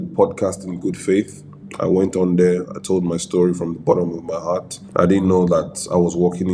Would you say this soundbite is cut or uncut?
uncut